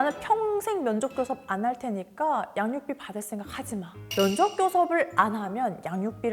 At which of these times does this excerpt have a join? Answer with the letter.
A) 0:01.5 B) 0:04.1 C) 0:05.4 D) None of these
B